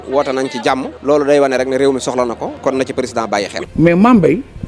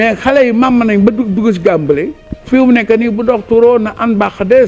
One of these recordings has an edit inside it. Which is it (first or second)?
first